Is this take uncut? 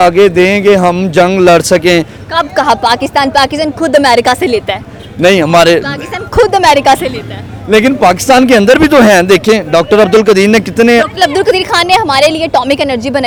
yes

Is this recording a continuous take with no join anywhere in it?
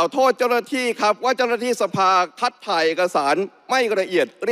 yes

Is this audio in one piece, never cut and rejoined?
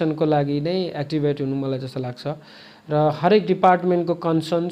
yes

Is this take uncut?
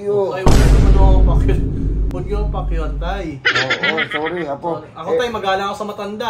yes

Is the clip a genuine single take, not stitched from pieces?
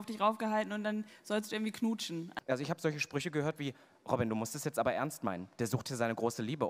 no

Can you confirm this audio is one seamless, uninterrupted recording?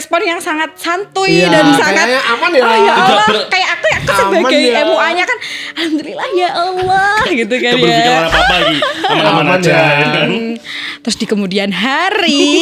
yes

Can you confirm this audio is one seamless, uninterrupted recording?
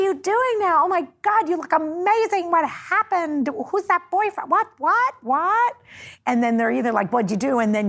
yes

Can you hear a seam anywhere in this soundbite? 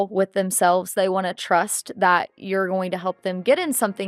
no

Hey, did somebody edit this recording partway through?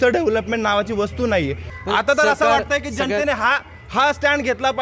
yes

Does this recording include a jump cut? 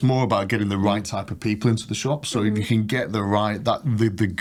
no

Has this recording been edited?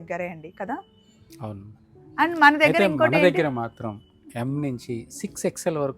no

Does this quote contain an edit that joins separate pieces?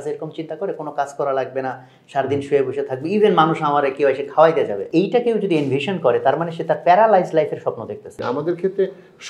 yes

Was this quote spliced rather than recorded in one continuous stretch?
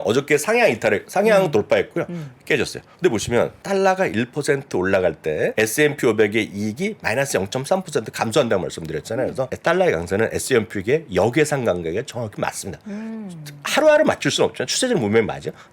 yes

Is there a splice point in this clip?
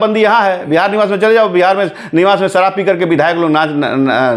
no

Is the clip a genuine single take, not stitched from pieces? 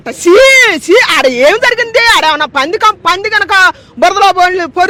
yes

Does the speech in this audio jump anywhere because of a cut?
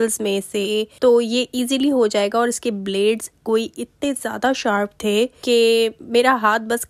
no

